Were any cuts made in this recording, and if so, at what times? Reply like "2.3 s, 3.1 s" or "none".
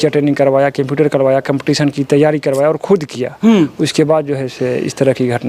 none